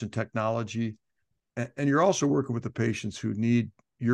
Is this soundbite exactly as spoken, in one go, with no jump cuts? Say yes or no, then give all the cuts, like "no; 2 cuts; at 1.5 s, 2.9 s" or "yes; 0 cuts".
yes; 0 cuts